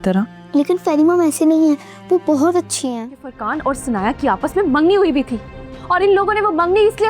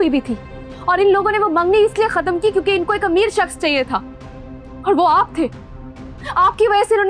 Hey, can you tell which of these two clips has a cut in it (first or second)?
first